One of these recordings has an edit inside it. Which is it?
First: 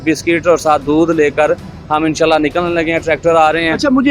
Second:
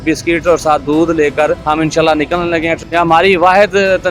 second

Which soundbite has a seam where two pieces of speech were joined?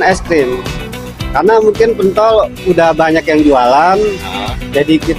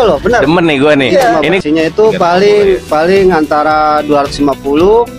second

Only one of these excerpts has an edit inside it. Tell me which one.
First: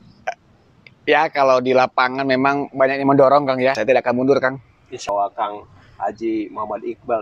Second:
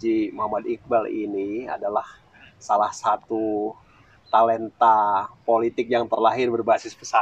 first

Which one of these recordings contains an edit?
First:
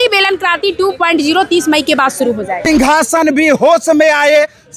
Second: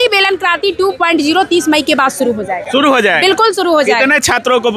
first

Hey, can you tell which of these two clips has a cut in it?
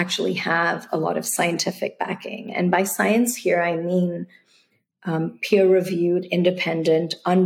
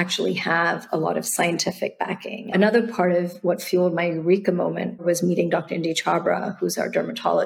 second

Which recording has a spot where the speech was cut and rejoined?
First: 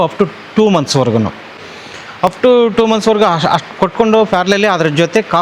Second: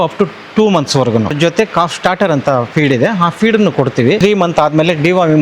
second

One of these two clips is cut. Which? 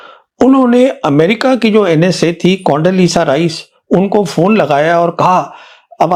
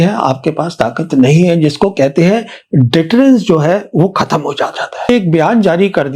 second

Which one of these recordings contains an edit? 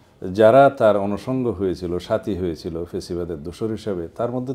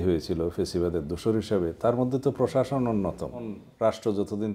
second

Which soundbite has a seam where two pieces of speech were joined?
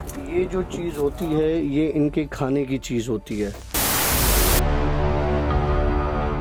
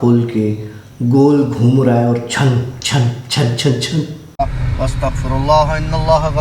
second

